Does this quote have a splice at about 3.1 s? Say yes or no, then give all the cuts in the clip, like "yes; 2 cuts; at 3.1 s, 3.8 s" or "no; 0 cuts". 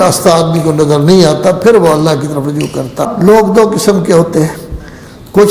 yes; 1 cut; at 3.1 s